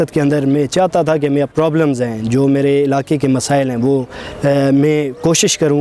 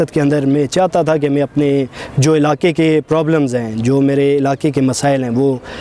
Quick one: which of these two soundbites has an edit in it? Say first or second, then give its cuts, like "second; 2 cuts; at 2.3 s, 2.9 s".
first; 1 cut; at 1.5 s